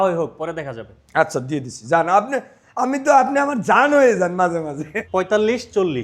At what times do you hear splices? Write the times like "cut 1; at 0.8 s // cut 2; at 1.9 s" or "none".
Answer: cut 1; at 4.9 s